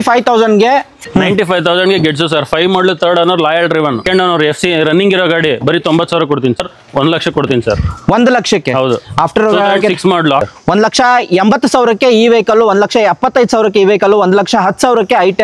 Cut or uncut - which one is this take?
cut